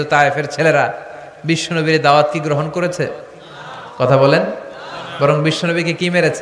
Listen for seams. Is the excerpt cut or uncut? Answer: uncut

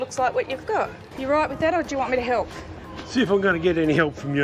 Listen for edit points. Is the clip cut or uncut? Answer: cut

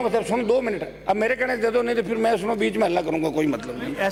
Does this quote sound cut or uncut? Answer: uncut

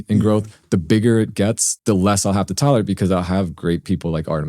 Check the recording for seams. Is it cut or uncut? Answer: cut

